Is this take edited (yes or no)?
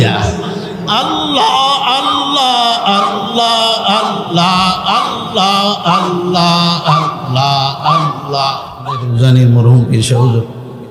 yes